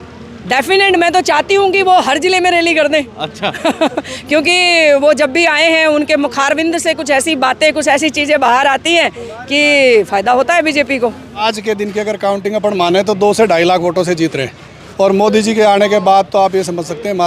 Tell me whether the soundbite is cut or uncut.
cut